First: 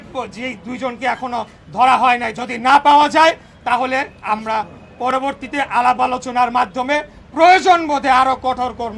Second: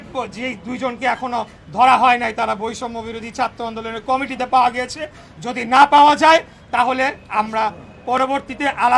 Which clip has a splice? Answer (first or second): first